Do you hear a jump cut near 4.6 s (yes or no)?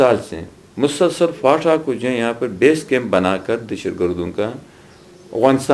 no